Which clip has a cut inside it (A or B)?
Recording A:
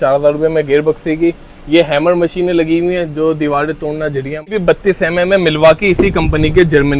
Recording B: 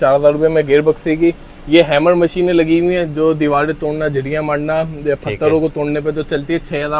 A